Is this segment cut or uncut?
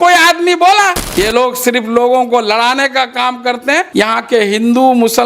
cut